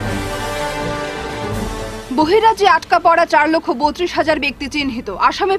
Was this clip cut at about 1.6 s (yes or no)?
yes